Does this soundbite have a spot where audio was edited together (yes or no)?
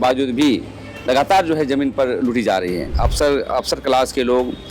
yes